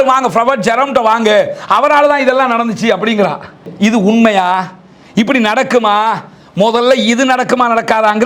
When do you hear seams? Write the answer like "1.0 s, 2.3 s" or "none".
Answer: 3.6 s